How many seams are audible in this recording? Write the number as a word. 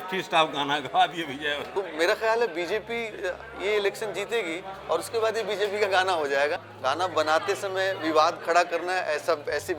two